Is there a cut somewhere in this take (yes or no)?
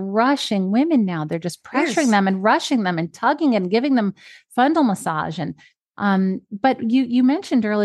no